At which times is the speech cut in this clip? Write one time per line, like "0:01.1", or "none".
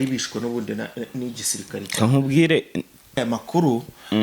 0:03.2